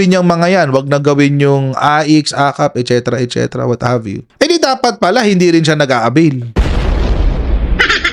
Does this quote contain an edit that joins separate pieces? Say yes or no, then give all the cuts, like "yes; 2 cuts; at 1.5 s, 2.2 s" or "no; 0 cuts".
yes; 1 cut; at 4.2 s